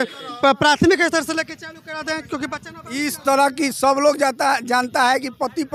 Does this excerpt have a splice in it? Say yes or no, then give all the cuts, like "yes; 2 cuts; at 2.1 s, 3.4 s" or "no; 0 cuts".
no; 0 cuts